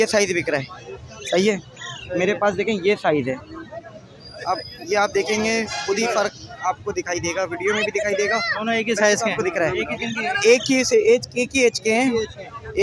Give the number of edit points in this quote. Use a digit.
0